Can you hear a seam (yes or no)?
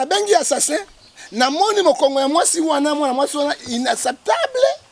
no